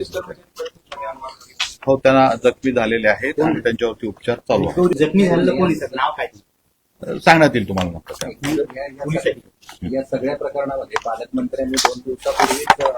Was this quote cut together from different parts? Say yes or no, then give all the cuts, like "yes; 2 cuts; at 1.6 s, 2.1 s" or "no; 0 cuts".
yes; 1 cut; at 4.9 s